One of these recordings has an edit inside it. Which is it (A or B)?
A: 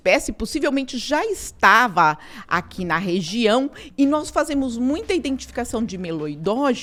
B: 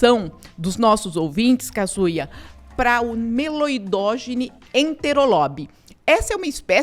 B